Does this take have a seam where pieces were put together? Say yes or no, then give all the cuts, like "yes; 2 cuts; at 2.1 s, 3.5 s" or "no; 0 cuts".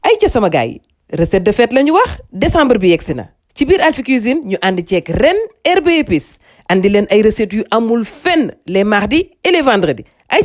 no; 0 cuts